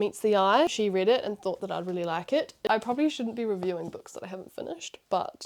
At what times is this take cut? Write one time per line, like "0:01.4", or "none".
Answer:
0:00.7
0:02.6